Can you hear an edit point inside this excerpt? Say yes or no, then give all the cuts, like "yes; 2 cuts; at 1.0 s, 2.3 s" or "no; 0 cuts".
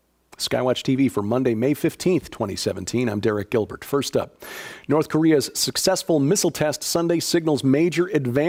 no; 0 cuts